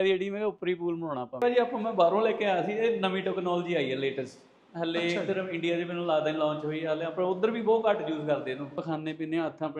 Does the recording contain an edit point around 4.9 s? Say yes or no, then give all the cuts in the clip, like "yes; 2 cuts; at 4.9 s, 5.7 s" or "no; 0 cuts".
no; 2 cuts; at 1.4 s, 8.8 s